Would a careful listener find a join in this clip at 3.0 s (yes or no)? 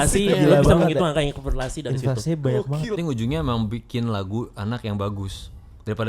yes